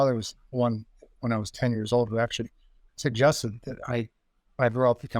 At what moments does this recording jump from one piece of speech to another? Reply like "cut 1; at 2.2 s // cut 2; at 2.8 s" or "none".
none